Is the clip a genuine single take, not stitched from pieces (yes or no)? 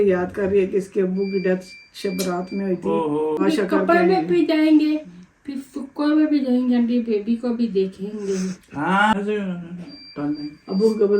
no